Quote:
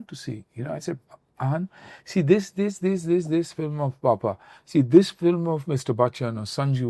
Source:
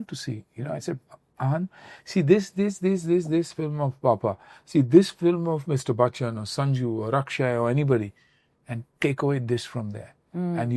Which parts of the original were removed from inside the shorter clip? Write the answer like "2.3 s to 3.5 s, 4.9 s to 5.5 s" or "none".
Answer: none